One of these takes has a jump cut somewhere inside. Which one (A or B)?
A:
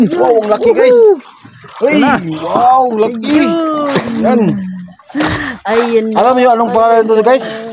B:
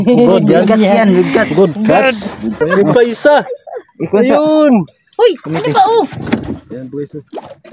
B